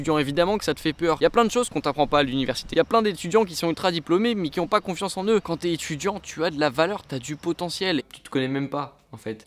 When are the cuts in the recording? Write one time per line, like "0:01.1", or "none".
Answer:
0:01.2
0:02.7
0:05.4
0:08.0